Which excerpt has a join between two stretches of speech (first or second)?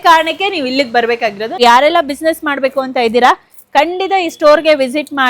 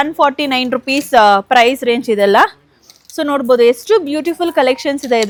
first